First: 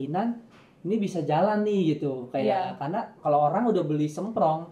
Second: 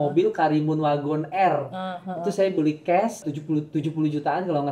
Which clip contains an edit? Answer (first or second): second